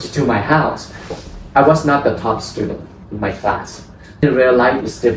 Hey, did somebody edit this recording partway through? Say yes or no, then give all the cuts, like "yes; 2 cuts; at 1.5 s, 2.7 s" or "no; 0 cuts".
yes; 2 cuts; at 1.1 s, 4.2 s